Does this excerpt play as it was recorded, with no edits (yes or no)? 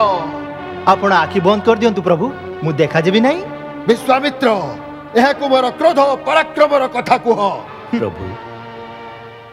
no